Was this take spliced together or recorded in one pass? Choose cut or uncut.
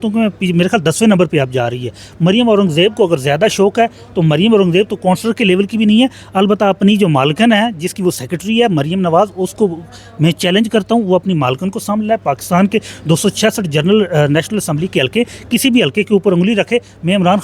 uncut